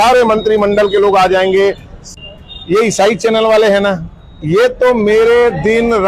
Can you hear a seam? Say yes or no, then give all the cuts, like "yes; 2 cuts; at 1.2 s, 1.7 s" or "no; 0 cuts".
yes; 1 cut; at 2.2 s